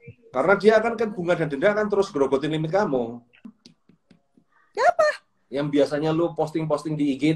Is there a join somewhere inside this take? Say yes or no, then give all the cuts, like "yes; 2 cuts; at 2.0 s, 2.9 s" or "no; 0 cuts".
yes; 1 cut; at 3.4 s